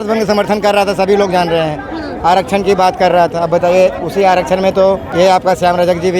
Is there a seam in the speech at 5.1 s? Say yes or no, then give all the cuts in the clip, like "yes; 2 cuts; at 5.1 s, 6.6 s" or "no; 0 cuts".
yes; 1 cut; at 5.1 s